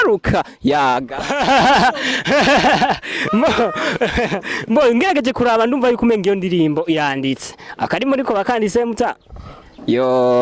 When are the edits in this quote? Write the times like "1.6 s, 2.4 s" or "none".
none